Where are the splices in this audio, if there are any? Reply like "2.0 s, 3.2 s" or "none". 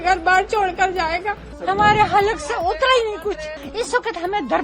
1.5 s, 3.6 s